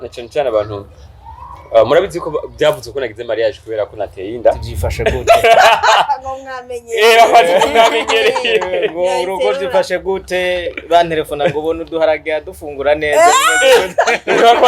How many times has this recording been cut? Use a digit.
1